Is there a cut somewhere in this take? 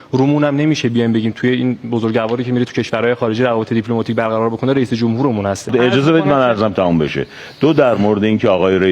yes; 1 cut; at 5.7 s

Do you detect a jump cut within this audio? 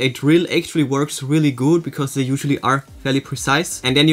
no; 0 cuts

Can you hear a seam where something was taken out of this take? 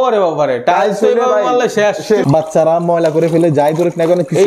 yes; 1 cut; at 2.2 s

